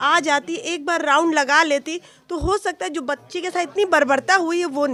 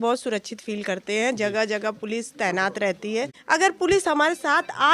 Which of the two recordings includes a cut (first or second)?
second